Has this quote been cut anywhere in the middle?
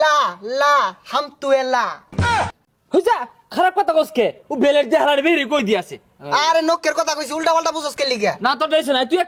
no; 0 cuts

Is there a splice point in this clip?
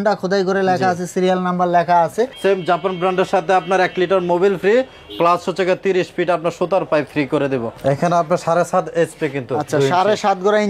yes; 2 cuts; at 2.3 s, 7.7 s

